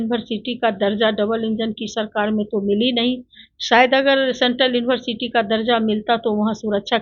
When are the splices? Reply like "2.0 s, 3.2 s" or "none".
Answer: none